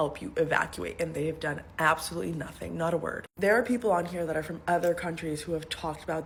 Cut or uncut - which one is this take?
uncut